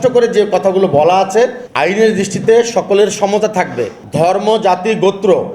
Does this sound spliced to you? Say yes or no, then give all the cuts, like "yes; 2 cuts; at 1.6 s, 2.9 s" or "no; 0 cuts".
yes; 2 cuts; at 1.6 s, 4.0 s